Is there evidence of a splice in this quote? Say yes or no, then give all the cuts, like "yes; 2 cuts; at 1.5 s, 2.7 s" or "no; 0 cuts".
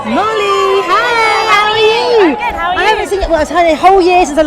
no; 0 cuts